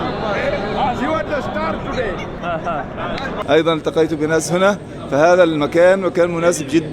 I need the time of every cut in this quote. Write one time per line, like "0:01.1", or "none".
0:03.3